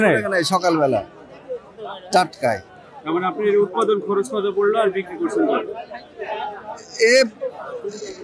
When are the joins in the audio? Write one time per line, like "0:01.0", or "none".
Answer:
none

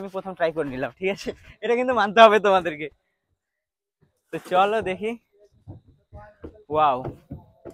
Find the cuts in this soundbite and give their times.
none

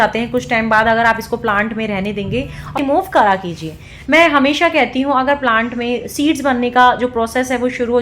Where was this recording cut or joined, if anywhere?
0:02.8

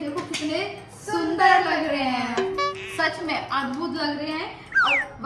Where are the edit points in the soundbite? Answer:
none

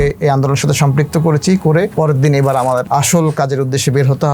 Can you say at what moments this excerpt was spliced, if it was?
0:01.9
0:02.9

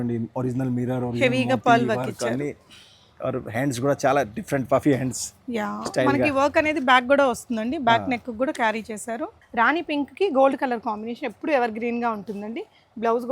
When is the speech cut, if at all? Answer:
0:09.4

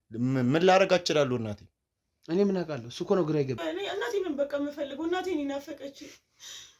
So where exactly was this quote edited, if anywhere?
0:03.6

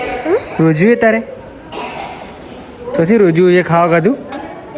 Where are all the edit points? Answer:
none

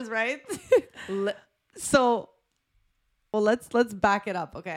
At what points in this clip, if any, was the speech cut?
0:03.2

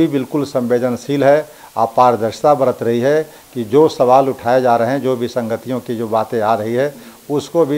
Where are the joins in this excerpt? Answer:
none

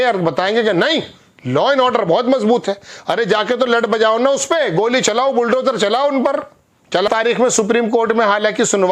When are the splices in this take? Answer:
0:07.1

